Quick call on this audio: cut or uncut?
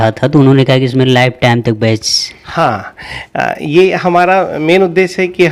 uncut